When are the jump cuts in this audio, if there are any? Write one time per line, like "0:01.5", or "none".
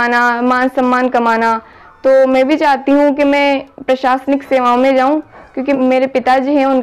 none